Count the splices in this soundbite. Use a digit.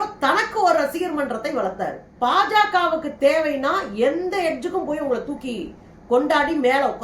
1